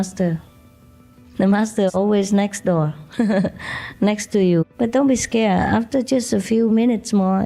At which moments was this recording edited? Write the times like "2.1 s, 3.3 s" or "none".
1.2 s, 4.6 s